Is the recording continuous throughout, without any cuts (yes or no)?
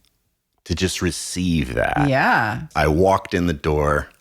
no